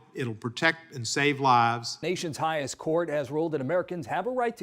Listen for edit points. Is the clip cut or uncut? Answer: cut